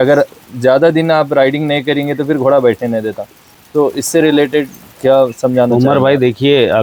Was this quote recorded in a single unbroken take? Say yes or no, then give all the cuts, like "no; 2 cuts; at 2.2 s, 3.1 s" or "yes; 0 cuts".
yes; 0 cuts